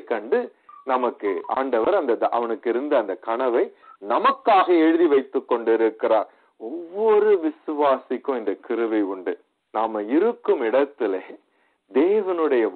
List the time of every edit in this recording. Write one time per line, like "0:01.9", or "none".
0:09.5